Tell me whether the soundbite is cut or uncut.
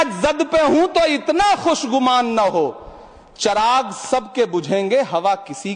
uncut